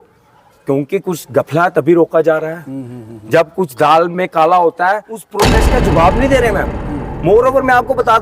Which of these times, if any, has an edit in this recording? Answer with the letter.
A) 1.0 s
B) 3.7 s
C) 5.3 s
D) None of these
C